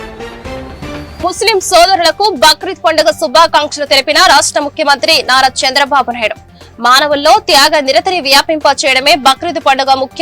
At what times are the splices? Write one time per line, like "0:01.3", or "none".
0:01.2

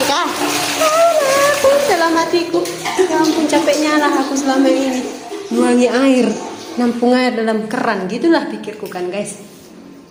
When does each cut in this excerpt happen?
none

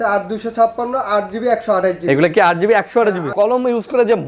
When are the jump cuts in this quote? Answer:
0:03.3

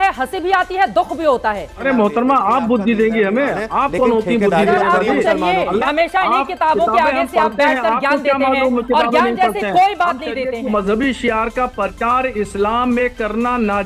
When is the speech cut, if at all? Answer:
0:01.7
0:05.9
0:10.7

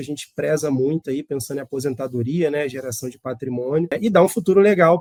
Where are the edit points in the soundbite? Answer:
none

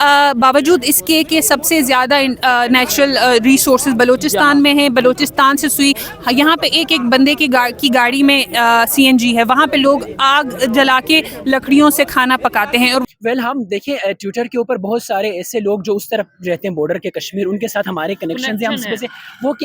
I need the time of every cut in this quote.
0:13.0

